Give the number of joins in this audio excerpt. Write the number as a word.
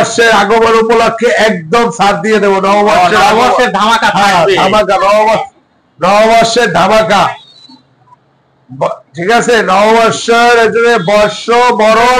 zero